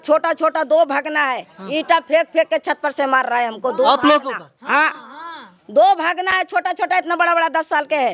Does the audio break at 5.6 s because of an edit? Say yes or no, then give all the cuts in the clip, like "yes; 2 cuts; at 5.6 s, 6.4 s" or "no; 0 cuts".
no; 0 cuts